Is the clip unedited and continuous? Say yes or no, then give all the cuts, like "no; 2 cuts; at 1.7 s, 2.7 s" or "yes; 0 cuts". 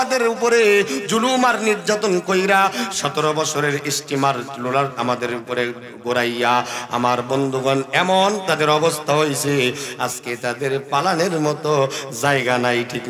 yes; 0 cuts